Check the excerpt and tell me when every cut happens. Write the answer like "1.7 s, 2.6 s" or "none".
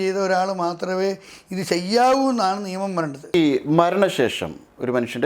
3.3 s